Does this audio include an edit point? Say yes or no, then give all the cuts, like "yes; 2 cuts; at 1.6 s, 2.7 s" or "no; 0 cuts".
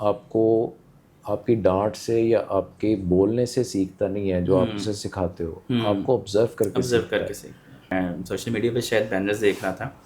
yes; 1 cut; at 7.9 s